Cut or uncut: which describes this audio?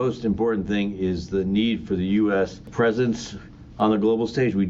cut